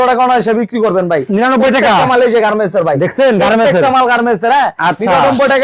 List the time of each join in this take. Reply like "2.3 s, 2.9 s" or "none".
none